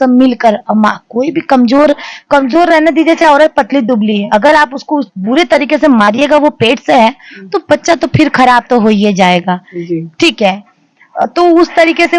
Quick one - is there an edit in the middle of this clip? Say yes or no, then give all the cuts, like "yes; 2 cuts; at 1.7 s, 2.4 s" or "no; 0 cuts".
no; 0 cuts